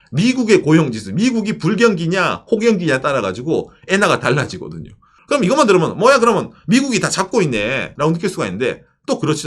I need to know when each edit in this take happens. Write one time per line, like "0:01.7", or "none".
0:07.9